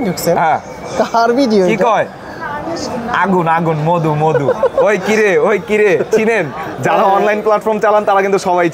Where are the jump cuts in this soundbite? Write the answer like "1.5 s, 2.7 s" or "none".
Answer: none